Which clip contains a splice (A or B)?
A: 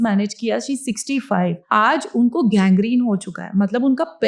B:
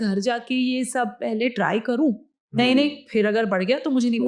A